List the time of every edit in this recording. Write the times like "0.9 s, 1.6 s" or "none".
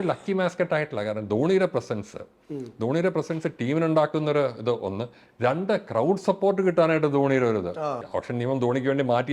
8.0 s